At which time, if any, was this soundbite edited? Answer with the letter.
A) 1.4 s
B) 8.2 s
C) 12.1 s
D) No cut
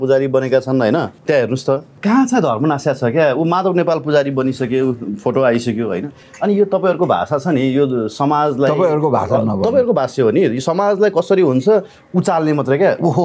A